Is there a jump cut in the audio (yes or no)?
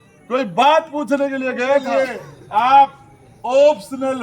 yes